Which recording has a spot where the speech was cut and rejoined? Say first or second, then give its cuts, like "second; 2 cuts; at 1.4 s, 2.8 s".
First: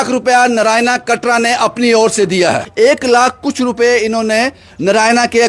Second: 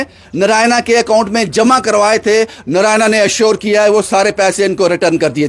first; 1 cut; at 2.7 s